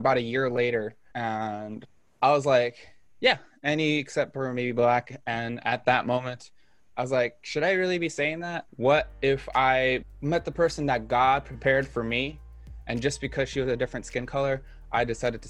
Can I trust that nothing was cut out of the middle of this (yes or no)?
yes